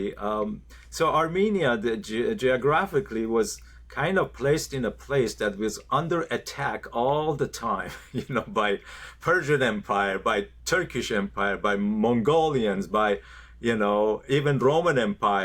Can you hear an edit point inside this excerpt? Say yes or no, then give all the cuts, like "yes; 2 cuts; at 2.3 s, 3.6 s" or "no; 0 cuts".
no; 0 cuts